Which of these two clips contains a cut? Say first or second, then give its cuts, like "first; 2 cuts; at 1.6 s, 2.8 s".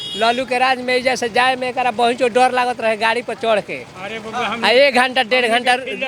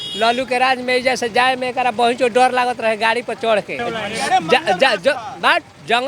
second; 1 cut; at 3.8 s